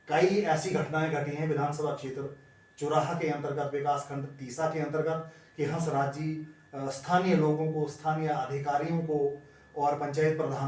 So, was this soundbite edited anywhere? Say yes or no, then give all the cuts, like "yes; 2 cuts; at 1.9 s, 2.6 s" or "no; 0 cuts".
no; 0 cuts